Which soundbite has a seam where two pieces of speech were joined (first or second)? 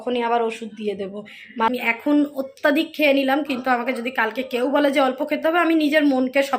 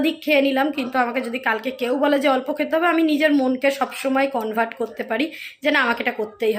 first